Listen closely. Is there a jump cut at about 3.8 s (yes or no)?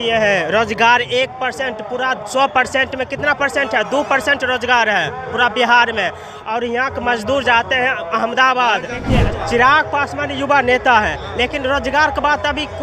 no